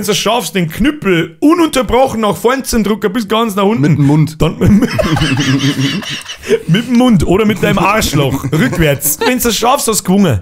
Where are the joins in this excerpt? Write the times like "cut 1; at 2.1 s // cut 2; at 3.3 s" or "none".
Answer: cut 1; at 9.2 s